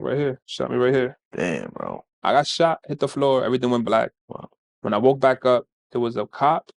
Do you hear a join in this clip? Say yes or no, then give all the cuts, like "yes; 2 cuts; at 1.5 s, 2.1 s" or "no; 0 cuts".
yes; 1 cut; at 2.1 s